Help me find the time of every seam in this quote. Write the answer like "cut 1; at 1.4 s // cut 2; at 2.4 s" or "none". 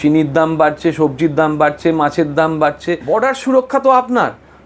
cut 1; at 2.9 s